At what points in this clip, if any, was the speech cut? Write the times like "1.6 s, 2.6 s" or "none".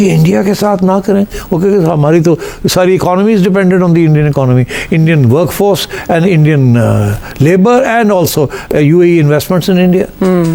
none